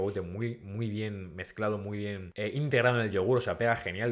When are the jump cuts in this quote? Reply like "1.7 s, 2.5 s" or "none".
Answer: 2.3 s